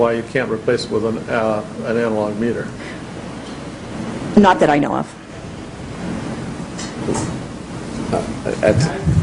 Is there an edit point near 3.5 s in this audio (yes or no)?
yes